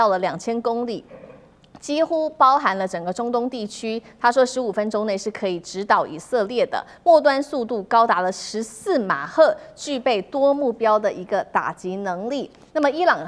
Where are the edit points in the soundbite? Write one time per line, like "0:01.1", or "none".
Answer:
none